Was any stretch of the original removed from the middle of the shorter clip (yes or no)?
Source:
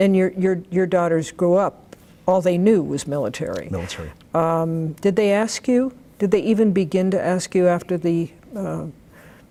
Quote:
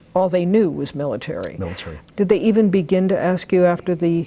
yes